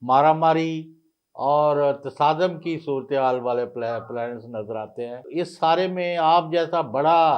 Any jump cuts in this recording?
yes; 1 cut; at 5.2 s

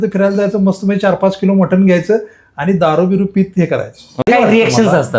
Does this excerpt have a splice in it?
yes; 1 cut; at 4.2 s

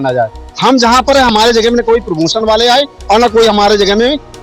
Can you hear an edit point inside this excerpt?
no; 0 cuts

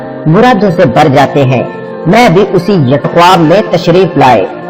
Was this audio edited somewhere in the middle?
no; 0 cuts

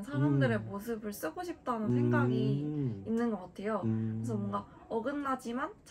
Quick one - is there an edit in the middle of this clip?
no; 0 cuts

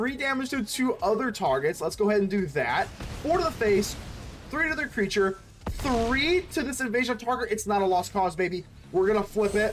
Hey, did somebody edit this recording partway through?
no; 0 cuts

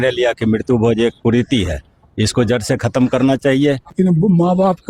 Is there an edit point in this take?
yes; 1 cut; at 3.9 s

